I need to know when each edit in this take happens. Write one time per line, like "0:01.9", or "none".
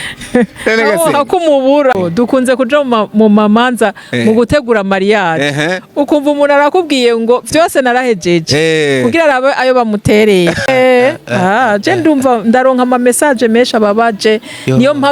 0:02.0
0:10.7